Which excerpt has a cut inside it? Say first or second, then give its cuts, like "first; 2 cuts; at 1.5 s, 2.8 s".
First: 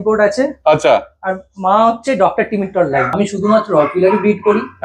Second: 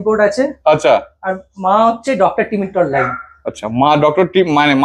first; 1 cut; at 3.1 s